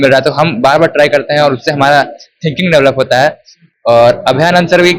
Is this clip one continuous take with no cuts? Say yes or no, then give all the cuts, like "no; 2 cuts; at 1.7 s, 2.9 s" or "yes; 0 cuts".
yes; 0 cuts